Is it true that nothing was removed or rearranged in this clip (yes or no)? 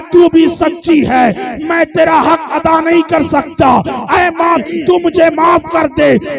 no